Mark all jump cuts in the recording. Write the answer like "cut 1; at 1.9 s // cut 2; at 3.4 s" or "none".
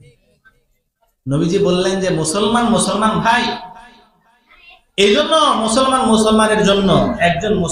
none